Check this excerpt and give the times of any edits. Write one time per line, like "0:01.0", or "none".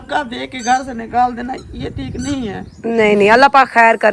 0:01.7